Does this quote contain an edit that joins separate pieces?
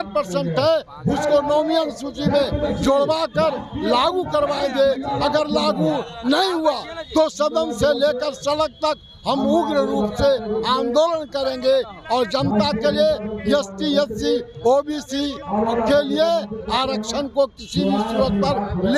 no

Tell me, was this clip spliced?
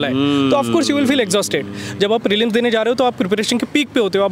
no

